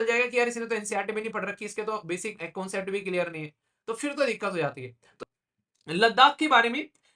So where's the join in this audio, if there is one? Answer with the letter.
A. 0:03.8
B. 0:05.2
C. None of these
B